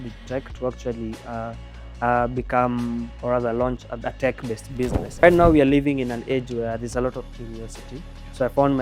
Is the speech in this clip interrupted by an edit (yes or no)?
yes